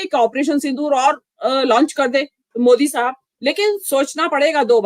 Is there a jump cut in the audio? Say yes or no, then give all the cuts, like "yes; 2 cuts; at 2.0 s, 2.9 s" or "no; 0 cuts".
yes; 1 cut; at 3.3 s